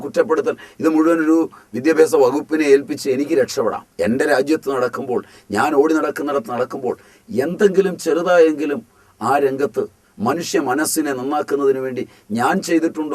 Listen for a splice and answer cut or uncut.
cut